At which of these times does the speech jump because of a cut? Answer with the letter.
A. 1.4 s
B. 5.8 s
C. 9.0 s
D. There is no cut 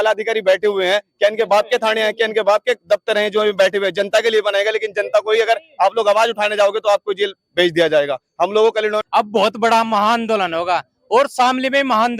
C